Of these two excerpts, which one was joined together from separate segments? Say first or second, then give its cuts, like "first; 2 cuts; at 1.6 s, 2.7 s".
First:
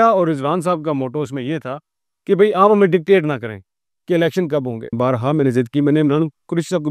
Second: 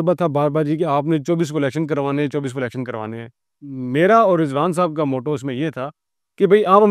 first; 1 cut; at 5.0 s